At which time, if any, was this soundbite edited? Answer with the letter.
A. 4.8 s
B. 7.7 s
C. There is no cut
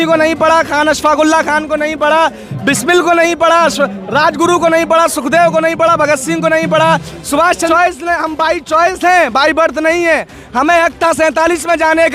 B